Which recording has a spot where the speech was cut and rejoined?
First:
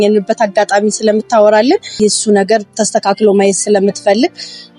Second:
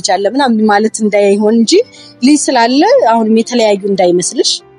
first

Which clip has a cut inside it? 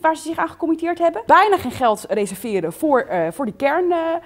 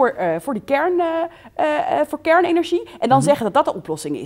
first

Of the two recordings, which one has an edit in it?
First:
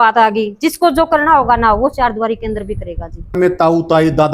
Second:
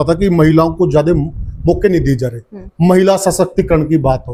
first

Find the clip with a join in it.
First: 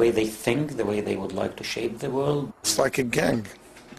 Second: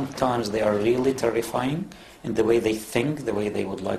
first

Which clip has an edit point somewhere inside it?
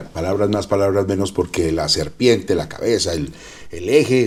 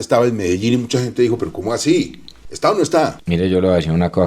second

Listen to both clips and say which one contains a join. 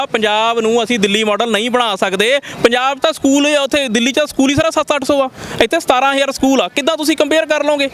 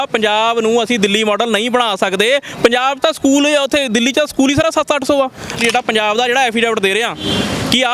second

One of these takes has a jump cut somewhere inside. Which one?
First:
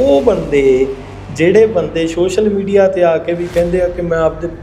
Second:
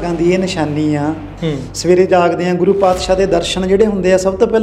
second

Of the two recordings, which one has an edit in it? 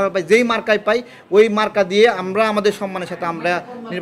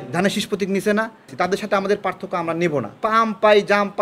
second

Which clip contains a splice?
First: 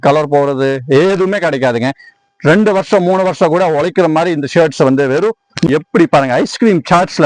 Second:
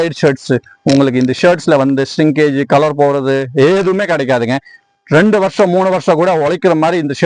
first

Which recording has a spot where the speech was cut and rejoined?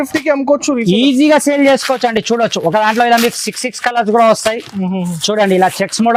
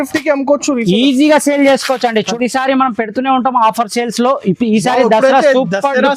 second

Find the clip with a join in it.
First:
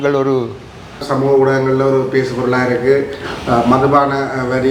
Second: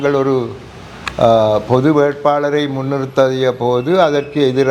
first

